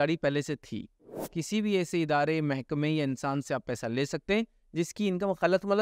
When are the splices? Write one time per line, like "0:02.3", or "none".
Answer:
0:01.2